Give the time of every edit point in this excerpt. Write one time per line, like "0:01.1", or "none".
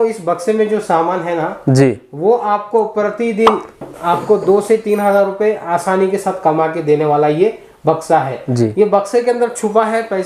none